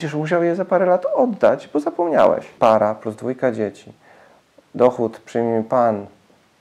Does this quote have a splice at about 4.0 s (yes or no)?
no